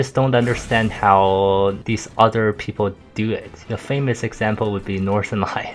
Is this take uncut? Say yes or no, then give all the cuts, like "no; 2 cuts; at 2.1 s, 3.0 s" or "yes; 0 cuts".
no; 2 cuts; at 1.8 s, 3.7 s